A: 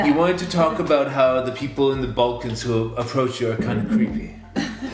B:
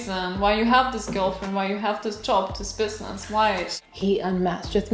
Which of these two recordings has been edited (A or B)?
B